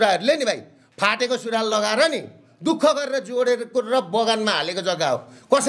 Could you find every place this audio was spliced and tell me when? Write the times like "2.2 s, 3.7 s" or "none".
none